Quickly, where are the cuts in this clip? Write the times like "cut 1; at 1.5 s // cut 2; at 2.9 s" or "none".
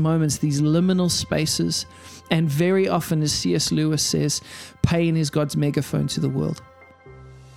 cut 1; at 6.6 s